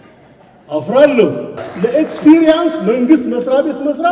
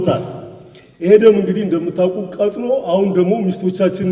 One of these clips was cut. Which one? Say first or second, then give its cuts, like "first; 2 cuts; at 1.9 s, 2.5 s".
first; 1 cut; at 1.6 s